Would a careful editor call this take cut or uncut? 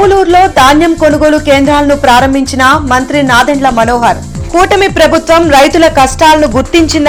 uncut